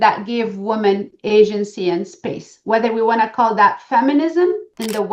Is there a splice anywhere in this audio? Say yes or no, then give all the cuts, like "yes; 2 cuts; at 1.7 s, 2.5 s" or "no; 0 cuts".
no; 0 cuts